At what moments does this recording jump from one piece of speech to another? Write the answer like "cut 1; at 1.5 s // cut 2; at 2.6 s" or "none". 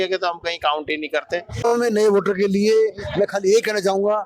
cut 1; at 1.7 s